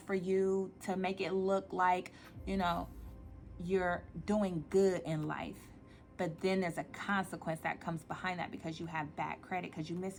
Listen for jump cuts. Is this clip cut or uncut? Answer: uncut